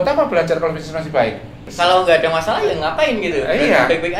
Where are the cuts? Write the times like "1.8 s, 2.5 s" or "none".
1.7 s

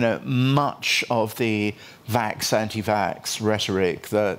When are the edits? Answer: none

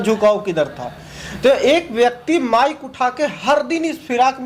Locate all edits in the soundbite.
none

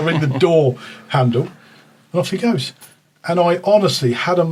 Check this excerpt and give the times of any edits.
none

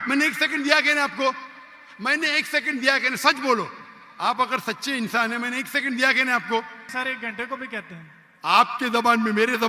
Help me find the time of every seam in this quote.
6.8 s

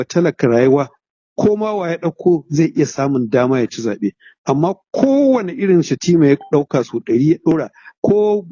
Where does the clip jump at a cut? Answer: none

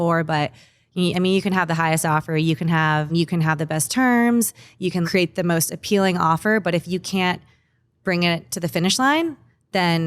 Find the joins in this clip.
3.1 s, 5.1 s

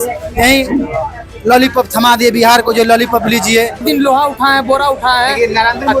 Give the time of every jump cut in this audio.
3.8 s

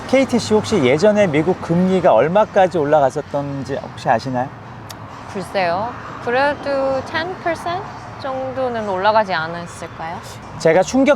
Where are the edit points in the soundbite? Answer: none

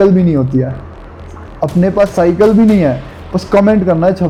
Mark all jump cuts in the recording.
none

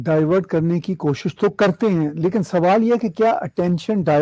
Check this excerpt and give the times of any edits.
none

